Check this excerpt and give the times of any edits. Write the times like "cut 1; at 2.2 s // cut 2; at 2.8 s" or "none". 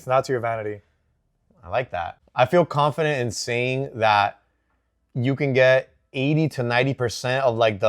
cut 1; at 2.3 s

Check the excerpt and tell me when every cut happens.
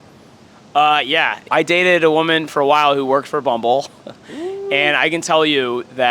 cut 1; at 1.4 s

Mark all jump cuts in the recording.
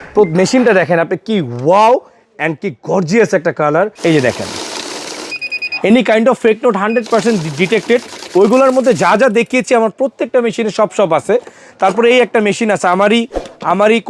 cut 1; at 4.0 s

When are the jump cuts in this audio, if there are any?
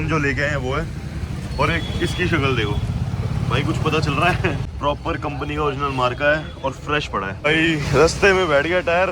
cut 1; at 4.7 s // cut 2; at 7.3 s

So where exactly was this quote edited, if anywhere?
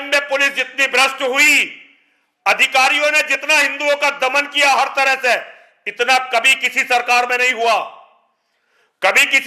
none

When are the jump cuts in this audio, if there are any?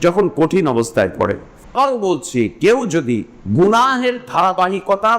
cut 1; at 1.8 s // cut 2; at 3.4 s

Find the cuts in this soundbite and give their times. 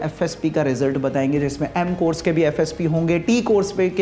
none

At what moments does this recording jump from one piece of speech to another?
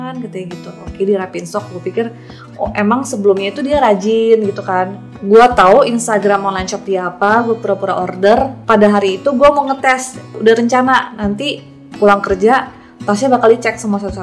cut 1; at 5.1 s // cut 2; at 8.6 s // cut 3; at 10.3 s

